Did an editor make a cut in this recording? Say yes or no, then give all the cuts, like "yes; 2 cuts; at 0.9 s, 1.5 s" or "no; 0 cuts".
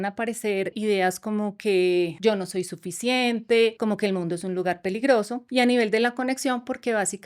yes; 4 cuts; at 0.8 s, 2.1 s, 3.8 s, 5.4 s